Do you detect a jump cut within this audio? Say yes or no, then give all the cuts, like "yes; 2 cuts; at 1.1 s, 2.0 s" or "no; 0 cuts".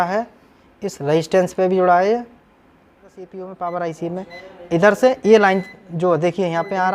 yes; 1 cut; at 3.3 s